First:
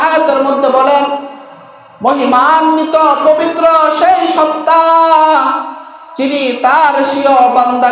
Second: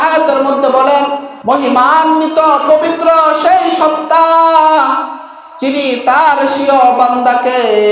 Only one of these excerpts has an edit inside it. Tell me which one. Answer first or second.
second